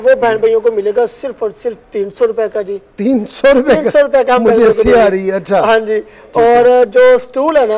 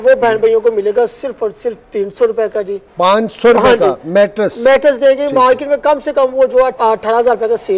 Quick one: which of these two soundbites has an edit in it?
second; 2 cuts; at 2.8 s, 6.7 s

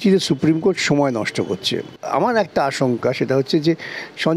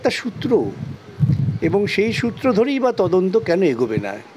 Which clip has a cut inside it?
first; 1 cut; at 1.9 s

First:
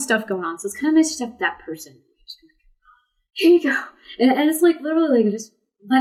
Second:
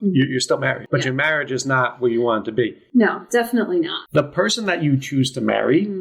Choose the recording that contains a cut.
second; 3 cuts; at 0.8 s, 2.8 s, 4.0 s

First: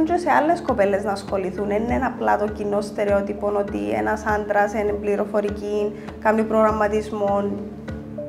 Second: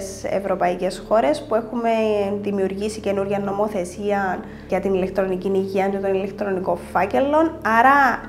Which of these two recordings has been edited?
second; 1 cut; at 4.7 s

